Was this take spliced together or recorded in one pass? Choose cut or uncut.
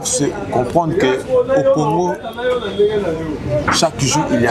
uncut